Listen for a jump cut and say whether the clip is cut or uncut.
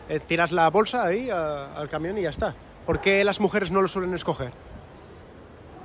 uncut